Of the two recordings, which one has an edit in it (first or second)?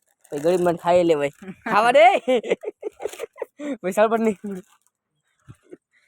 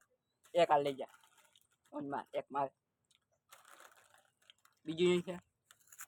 first